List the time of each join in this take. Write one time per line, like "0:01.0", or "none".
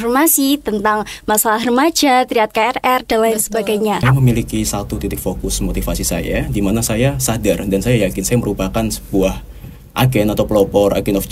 0:04.0